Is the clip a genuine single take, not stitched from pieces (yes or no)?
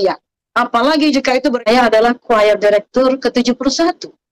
no